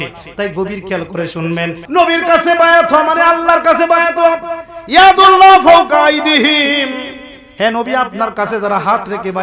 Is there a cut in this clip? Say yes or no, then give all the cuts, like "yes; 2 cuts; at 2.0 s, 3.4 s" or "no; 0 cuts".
yes; 1 cut; at 1.8 s